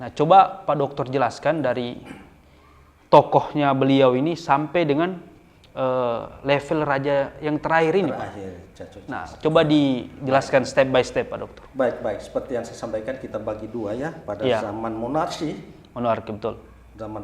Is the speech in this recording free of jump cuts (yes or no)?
yes